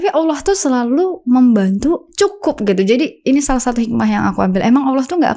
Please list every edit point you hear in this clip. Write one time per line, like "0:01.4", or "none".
none